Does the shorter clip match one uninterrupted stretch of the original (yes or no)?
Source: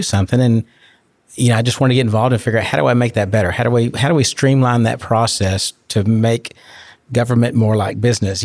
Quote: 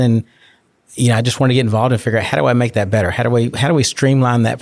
yes